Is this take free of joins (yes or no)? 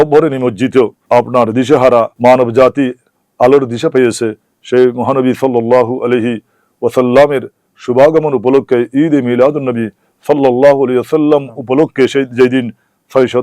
no